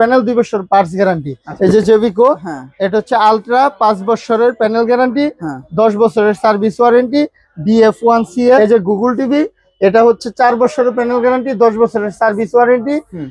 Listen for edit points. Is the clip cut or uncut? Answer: cut